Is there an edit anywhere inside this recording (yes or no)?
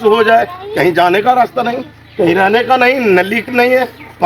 no